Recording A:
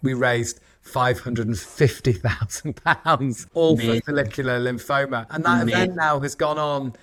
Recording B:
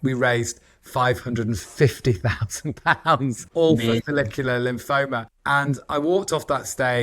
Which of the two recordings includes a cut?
B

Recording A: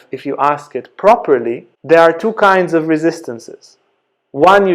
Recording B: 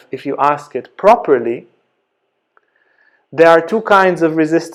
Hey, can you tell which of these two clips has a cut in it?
A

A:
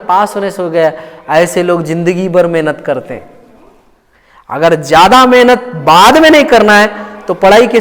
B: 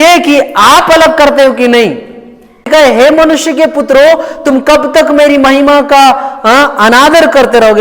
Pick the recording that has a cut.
B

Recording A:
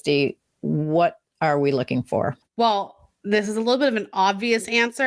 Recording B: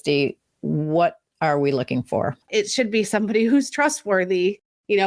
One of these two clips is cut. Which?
B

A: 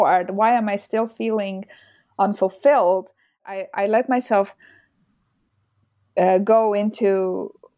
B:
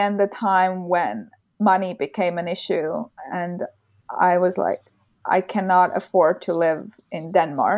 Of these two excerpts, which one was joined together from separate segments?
A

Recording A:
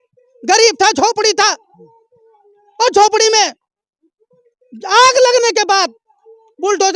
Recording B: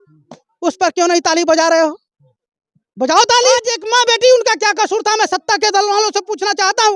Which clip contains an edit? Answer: B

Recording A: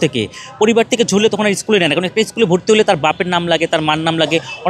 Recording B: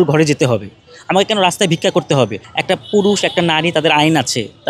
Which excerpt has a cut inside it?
B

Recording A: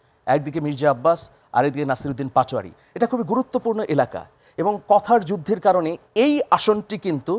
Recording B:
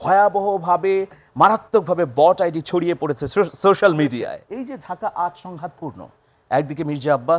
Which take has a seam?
B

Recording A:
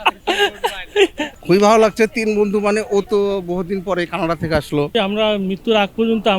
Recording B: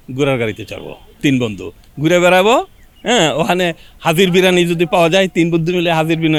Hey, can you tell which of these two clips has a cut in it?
A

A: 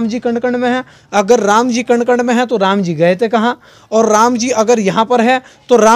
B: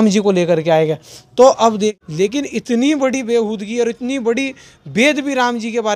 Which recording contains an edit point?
B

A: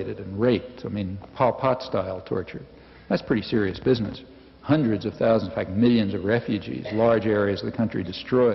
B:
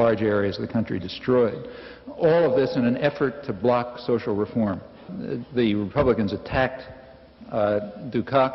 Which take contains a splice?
B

